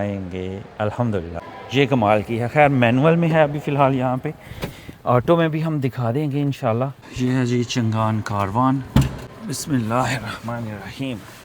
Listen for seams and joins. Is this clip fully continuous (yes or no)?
no